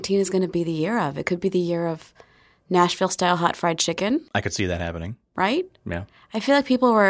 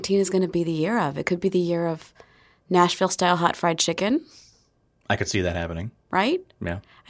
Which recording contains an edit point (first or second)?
first